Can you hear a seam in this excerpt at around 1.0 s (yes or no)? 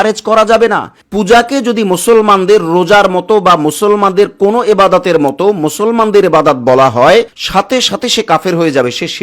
yes